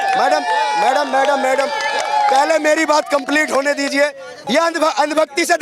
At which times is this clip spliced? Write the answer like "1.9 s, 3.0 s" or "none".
4.3 s